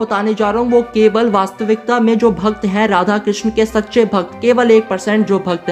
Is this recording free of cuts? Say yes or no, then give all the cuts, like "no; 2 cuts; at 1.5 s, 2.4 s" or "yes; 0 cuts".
yes; 0 cuts